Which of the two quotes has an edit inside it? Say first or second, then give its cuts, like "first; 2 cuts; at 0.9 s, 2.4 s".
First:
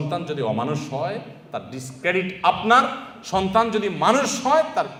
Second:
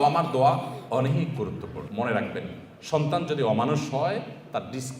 second; 1 cut; at 1.9 s